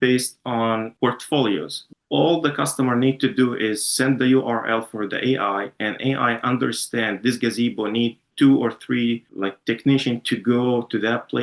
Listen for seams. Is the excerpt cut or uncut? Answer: cut